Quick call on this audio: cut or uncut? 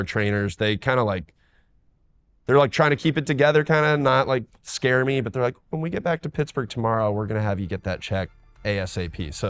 cut